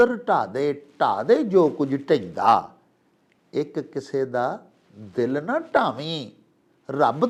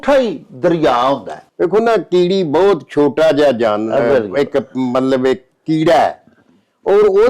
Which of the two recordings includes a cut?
second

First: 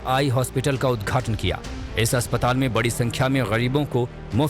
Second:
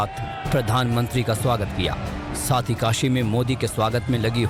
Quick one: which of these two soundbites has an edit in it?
first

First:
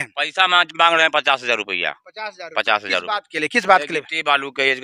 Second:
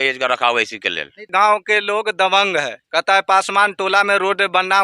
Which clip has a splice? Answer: second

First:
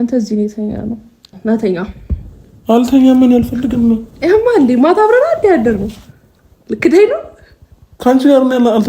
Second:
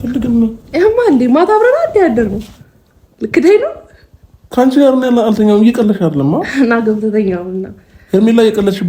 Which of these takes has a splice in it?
first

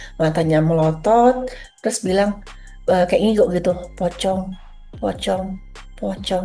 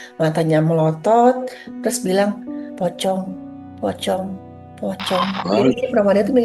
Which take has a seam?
second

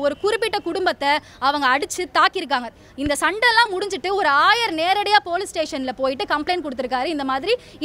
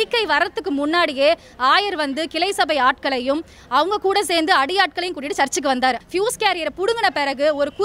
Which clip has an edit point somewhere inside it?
second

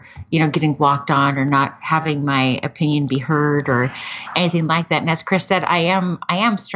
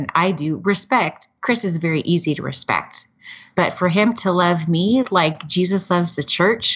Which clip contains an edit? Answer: second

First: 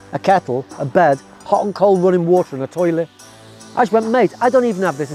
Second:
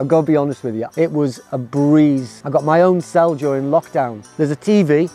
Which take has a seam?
second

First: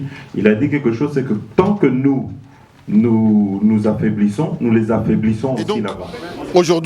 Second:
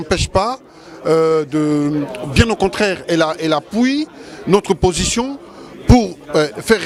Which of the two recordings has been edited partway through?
first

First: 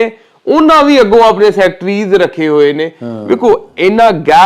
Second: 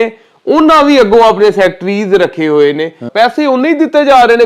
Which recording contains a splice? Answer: second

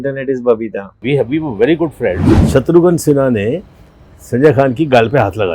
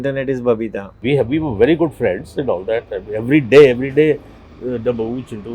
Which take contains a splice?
first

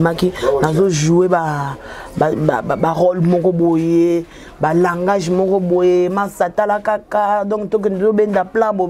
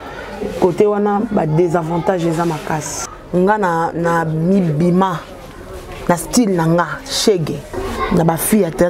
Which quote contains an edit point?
second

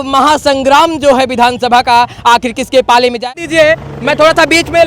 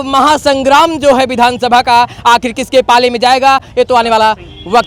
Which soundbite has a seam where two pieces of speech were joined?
first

